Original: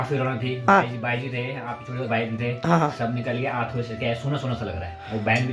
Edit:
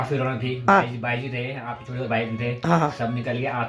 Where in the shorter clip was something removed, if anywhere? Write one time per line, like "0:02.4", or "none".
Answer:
none